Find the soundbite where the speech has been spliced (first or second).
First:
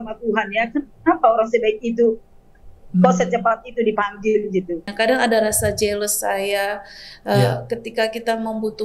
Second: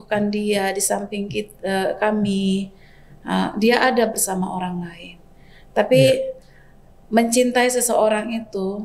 first